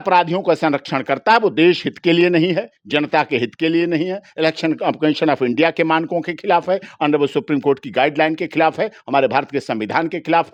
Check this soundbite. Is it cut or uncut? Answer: uncut